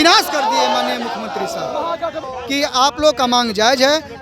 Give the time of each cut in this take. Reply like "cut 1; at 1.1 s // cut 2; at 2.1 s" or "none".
cut 1; at 2.2 s